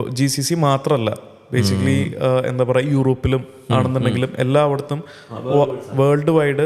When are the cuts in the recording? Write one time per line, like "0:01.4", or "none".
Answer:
none